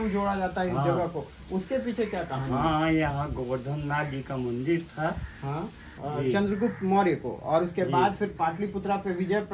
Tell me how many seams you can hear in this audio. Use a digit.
1